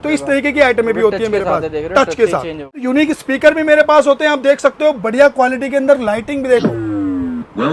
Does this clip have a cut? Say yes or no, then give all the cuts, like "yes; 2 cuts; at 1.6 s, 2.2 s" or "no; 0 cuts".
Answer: yes; 1 cut; at 2.8 s